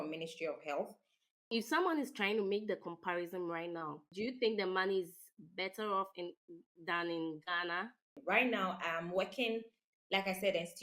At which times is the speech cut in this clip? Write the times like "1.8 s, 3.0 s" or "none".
1.5 s, 4.1 s, 8.2 s